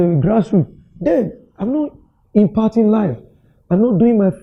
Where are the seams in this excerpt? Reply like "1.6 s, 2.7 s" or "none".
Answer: none